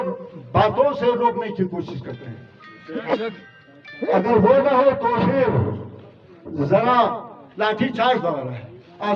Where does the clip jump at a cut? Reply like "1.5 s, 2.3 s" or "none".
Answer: none